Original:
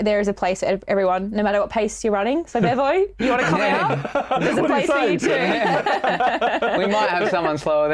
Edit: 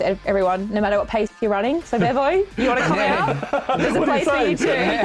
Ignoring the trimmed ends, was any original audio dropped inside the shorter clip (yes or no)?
no